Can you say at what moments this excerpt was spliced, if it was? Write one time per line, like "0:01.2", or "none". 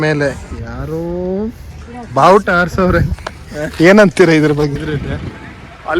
0:04.8